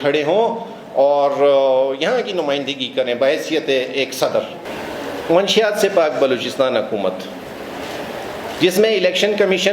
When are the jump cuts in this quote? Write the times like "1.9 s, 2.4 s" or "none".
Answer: 4.6 s